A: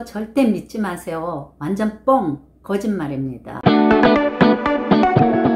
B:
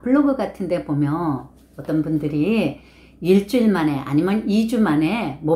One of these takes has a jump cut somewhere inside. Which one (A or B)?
A